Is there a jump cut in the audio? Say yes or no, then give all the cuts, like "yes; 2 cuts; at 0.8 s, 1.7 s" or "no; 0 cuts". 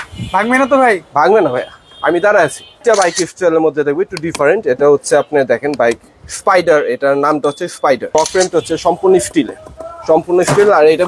yes; 2 cuts; at 2.8 s, 8.1 s